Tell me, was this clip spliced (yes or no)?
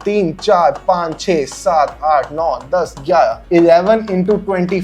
no